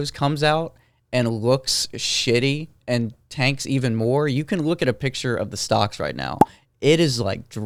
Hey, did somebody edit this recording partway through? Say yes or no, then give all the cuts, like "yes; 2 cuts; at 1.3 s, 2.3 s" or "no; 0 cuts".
no; 0 cuts